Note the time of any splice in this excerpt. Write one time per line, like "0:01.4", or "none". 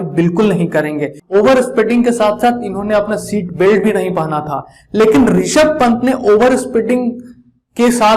0:01.2